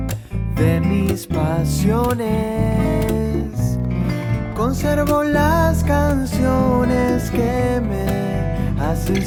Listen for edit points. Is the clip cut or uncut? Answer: uncut